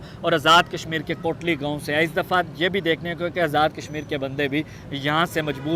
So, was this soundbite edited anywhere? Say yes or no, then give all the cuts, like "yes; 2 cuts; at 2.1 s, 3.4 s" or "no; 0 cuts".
no; 0 cuts